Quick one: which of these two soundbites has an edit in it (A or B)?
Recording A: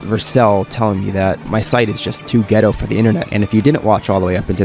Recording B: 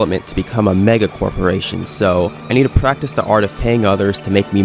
A